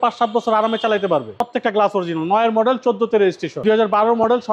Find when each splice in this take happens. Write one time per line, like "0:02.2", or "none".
0:01.4
0:03.6

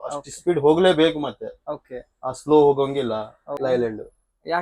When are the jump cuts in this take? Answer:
0:03.4

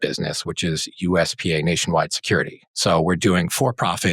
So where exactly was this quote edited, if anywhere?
0:02.6

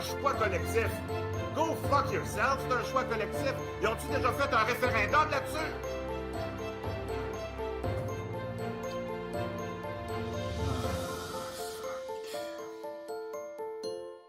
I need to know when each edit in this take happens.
0:04.8

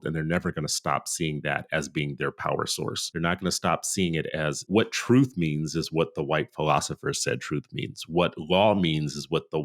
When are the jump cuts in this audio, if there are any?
0:03.1
0:04.6

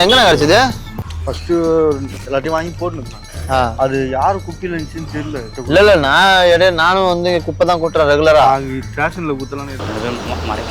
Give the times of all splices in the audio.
0:05.5

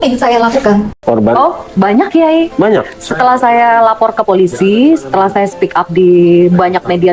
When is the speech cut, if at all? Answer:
0:00.9

